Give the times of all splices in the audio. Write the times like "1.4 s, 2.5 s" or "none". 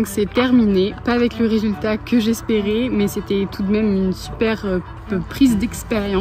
none